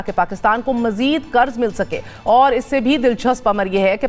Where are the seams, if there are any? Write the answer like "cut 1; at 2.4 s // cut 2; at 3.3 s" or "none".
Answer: none